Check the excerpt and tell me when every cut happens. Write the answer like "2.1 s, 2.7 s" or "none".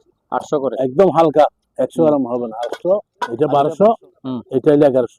3.2 s